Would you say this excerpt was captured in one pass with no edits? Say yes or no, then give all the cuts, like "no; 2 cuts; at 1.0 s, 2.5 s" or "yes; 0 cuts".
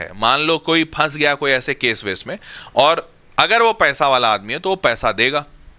yes; 0 cuts